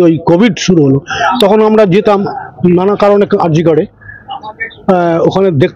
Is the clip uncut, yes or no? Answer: yes